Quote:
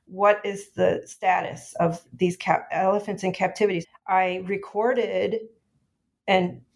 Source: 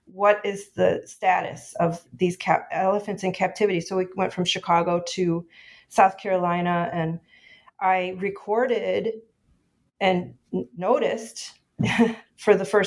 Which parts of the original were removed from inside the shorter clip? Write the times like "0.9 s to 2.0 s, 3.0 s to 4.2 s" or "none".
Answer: 3.8 s to 7.6 s

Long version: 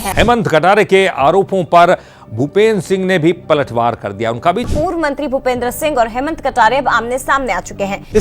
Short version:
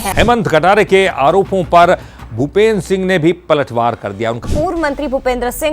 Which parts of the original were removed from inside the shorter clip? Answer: 4.4 s to 4.6 s

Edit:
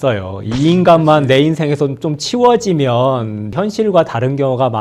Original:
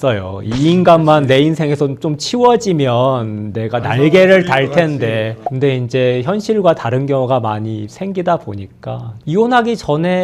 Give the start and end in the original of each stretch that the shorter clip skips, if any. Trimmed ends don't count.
3.5 s to 6.2 s

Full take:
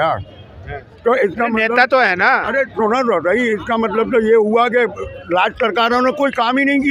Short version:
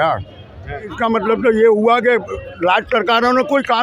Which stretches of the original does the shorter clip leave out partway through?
0.9 s to 3.6 s

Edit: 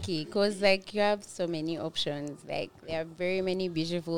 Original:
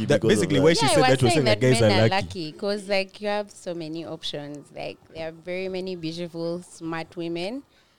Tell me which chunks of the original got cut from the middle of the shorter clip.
none

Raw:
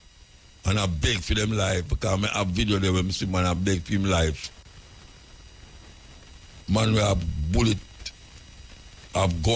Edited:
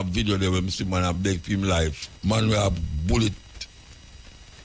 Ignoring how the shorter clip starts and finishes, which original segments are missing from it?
4.5 s to 6.5 s

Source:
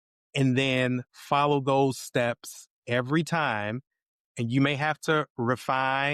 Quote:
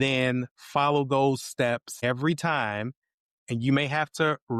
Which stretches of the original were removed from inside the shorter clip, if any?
2.5 s to 2.8 s

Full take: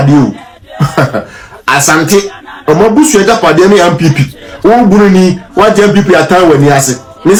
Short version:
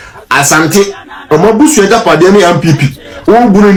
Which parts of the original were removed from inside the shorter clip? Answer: none

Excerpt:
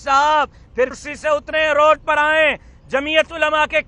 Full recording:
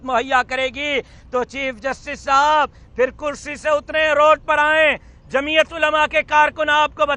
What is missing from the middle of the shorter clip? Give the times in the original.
3.3 s to 3.5 s

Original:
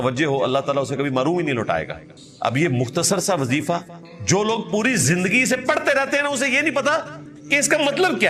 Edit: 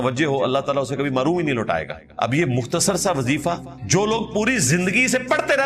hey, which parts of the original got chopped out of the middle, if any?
2.0 s to 2.2 s, 4.0 s to 4.1 s

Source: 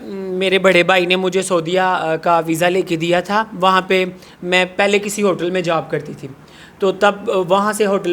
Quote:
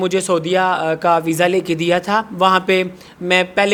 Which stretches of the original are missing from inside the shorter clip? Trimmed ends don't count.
none

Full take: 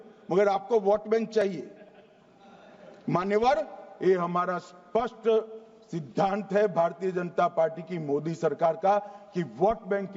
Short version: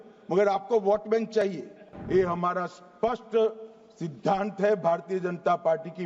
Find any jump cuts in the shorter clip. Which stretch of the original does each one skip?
1.9 s to 3.8 s

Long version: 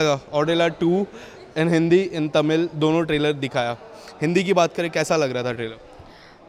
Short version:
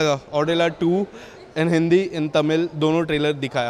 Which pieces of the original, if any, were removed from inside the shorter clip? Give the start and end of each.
none

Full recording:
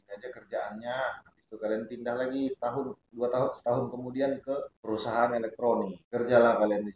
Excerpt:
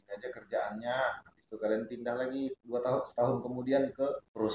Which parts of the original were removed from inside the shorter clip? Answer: 2.5 s to 3.0 s

